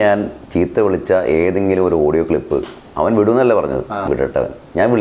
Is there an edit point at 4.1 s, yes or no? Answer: yes